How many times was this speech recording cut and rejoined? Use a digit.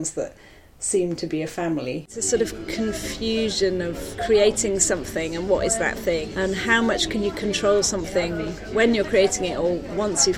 4